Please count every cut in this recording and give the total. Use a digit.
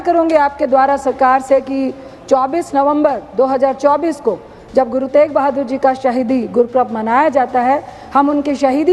0